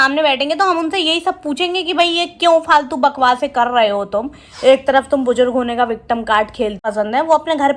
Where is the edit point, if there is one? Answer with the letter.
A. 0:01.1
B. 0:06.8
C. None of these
B